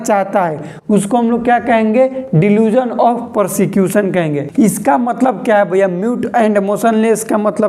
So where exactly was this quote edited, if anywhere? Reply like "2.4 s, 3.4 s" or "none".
4.4 s